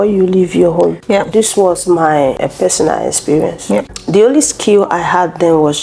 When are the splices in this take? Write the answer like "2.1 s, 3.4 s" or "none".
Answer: 1.0 s, 2.4 s, 4.0 s